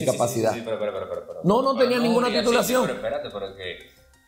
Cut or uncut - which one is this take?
uncut